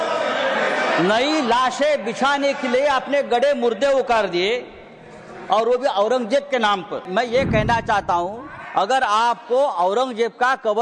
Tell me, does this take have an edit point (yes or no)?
yes